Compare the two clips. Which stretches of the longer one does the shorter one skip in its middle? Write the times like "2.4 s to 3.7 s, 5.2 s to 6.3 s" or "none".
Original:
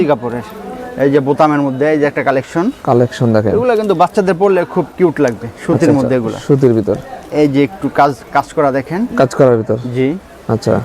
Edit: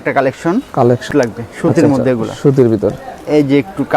3.2 s to 5.1 s